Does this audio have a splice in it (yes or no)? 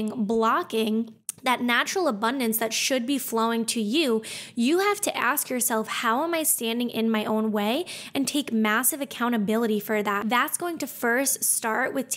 yes